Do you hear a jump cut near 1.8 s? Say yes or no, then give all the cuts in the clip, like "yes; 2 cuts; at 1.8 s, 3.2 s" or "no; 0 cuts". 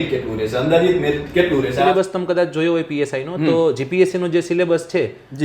yes; 1 cut; at 1.8 s